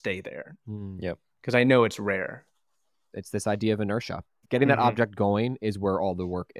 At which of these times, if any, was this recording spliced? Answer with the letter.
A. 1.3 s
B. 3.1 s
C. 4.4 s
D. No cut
B